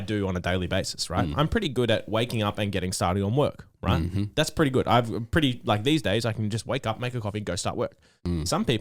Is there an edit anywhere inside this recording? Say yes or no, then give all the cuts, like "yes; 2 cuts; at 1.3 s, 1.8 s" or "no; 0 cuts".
no; 0 cuts